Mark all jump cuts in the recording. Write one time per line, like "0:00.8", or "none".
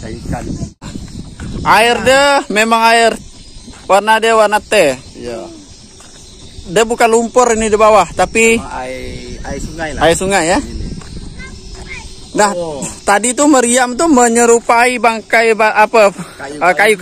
0:00.9